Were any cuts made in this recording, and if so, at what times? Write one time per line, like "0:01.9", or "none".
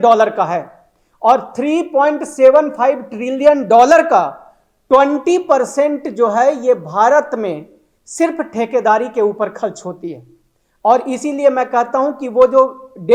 none